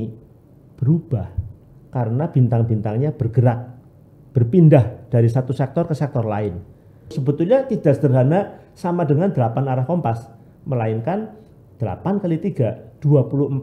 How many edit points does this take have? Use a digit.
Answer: 1